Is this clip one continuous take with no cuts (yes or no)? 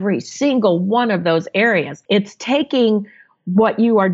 no